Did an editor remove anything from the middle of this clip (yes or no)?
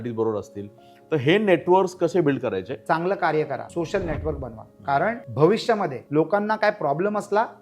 yes